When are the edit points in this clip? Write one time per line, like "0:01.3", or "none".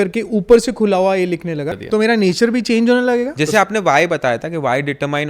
0:01.7
0:03.4